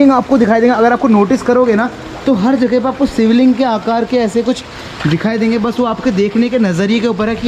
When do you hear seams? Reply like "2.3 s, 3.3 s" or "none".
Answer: none